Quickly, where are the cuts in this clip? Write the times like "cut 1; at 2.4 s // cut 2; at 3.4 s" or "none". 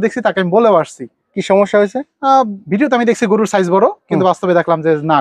none